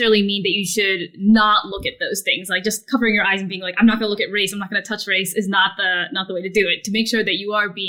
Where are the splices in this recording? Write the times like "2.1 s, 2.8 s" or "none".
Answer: none